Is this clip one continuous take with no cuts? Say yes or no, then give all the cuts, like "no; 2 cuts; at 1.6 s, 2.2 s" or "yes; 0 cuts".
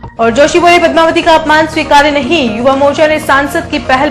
yes; 0 cuts